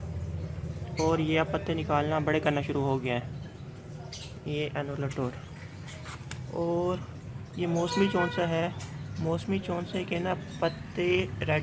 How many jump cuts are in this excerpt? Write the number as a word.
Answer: zero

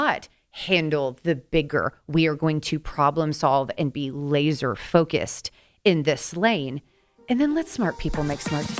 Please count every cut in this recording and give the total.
zero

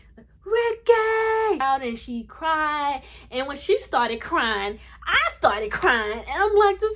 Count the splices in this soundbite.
one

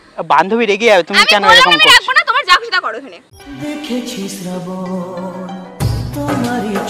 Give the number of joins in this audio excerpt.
zero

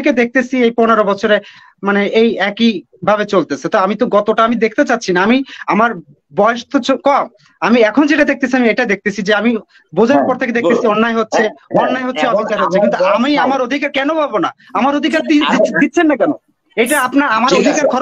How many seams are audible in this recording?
zero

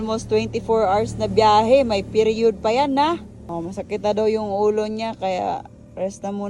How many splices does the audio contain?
zero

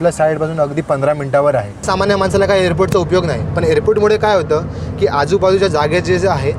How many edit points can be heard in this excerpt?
one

